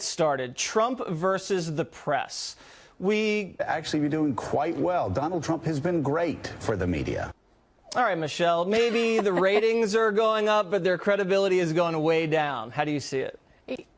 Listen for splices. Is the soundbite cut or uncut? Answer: uncut